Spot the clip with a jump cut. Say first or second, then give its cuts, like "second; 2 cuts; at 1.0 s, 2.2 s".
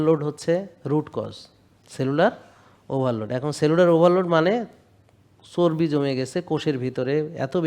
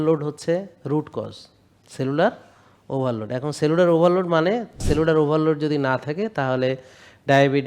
second; 1 cut; at 4.8 s